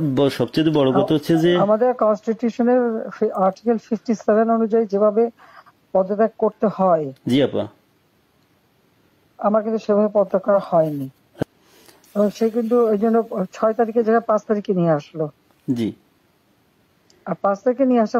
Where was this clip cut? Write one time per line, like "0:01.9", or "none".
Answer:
0:11.4

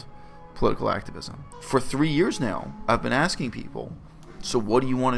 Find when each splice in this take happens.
0:01.5

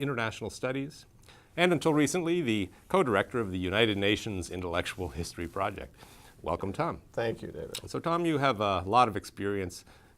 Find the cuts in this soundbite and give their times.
0:06.1

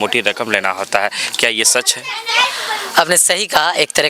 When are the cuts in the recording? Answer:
none

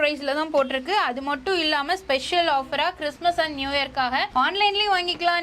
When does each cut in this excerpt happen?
0:04.3

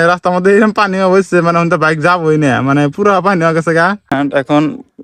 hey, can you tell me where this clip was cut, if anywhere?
0:04.1

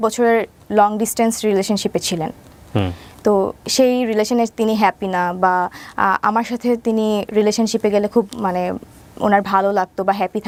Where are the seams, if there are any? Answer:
none

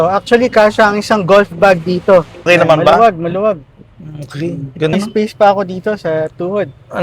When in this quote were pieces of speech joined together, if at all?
0:02.5
0:04.9

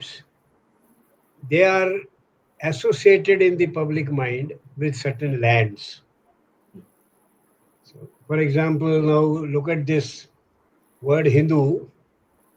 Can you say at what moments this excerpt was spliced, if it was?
none

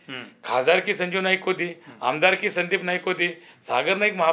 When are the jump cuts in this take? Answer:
none

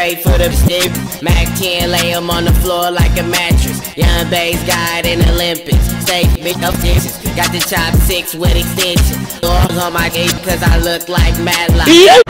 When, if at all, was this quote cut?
none

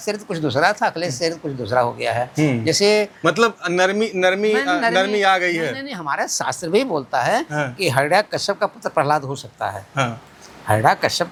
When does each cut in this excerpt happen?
none

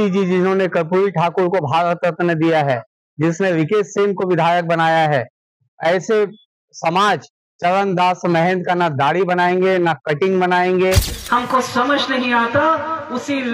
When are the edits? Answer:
0:11.1

